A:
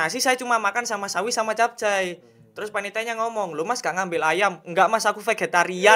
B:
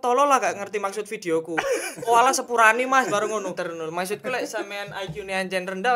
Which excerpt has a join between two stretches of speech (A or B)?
B